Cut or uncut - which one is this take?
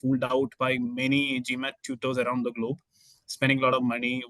uncut